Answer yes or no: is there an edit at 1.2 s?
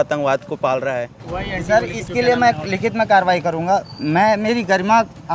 yes